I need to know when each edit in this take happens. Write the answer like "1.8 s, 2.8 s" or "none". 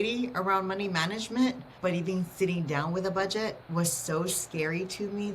1.7 s, 3.6 s